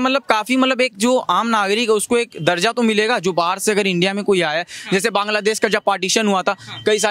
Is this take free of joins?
yes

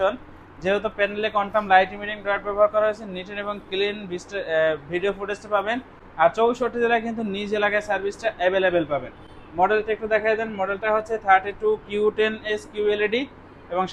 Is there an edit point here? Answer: no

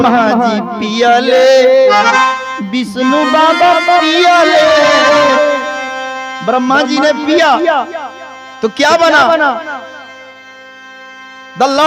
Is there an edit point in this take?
no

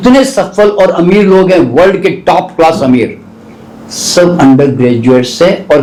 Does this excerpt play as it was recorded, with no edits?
yes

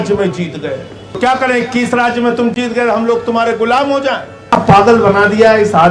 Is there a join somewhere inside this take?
yes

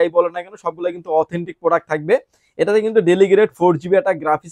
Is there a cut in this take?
no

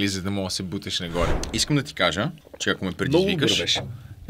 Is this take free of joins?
no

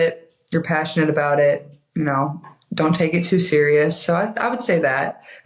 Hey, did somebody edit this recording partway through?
no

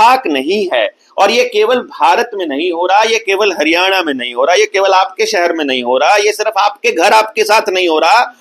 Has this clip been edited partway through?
no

